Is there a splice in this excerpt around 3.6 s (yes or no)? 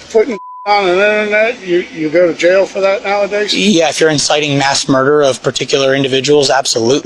no